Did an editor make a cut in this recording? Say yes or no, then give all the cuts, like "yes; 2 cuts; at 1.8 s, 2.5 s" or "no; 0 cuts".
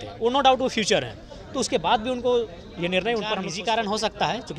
yes; 1 cut; at 3.5 s